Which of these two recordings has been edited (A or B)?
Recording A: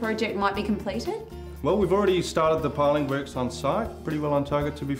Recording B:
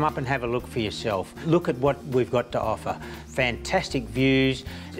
A